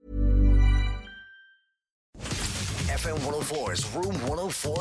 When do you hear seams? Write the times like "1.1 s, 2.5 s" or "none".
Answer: 2.2 s